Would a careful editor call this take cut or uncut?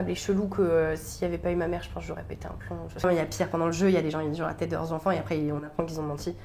cut